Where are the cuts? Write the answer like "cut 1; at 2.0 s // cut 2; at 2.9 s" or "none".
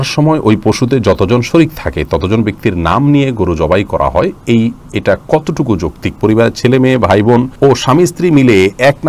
cut 1; at 6.2 s // cut 2; at 7.5 s